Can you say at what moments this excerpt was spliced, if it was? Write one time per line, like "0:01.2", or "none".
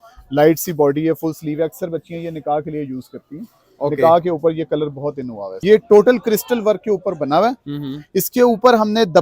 0:05.6